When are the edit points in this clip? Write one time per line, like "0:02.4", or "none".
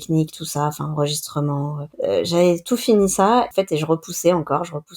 0:01.8
0:03.5

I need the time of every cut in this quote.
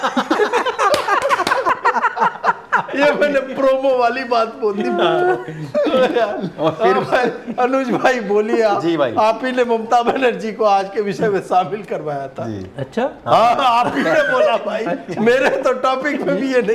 none

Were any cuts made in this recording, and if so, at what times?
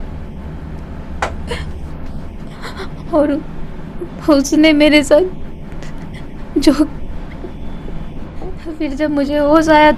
0:08.8

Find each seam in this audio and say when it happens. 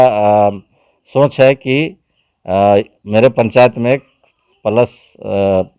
none

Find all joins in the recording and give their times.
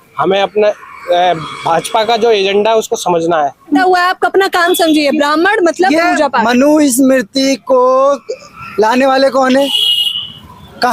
0:03.8

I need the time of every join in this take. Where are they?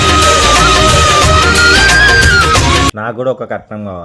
0:03.0

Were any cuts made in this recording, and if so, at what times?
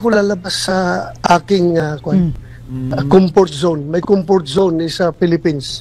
none

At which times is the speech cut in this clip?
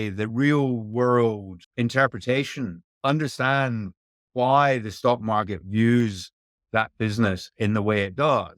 0:01.6
0:02.8

